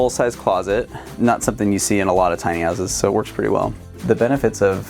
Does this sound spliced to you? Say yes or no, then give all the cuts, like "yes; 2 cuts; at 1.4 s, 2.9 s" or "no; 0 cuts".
yes; 1 cut; at 4.0 s